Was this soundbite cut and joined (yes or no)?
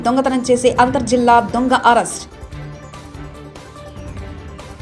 no